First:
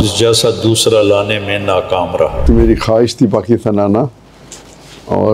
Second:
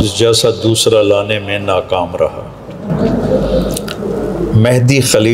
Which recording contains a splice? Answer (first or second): first